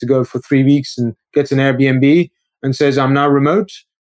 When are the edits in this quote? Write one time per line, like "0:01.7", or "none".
none